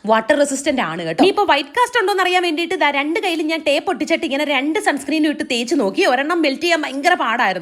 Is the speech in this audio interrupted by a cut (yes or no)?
no